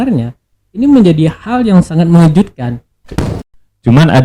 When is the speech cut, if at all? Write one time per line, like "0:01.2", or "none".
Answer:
0:03.2